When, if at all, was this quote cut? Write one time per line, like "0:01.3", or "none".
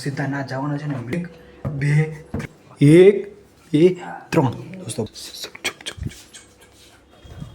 0:01.1
0:02.4
0:05.1